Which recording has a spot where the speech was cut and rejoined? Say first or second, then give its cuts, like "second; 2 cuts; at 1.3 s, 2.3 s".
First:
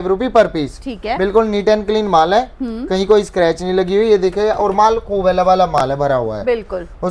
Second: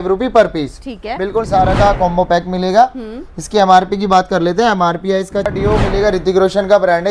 second; 2 cuts; at 1.5 s, 5.5 s